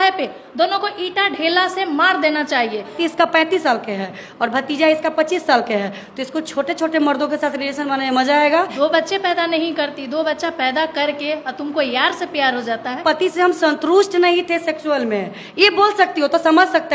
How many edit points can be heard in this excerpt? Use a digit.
3